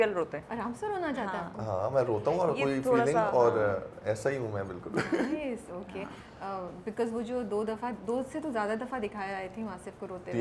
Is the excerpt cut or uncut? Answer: uncut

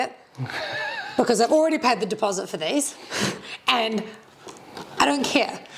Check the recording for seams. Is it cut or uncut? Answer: uncut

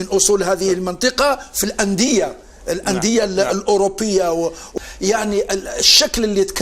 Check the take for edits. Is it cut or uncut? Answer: cut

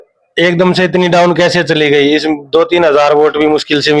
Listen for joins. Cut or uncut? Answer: uncut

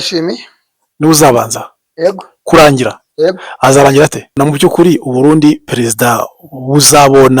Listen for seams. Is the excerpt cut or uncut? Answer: cut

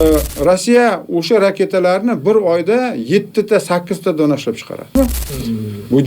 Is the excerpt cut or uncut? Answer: cut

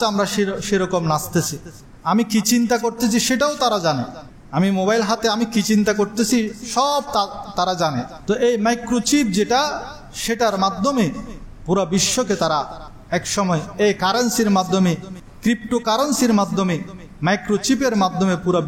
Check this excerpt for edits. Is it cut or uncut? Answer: cut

